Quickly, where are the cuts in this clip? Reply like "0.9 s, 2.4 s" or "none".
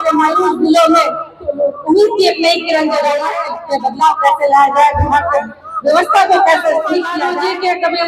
3.4 s, 7.2 s